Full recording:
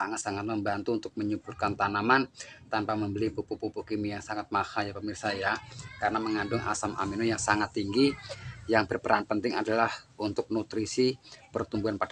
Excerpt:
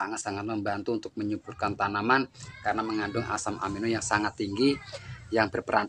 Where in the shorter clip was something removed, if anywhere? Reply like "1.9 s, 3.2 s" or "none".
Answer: 2.4 s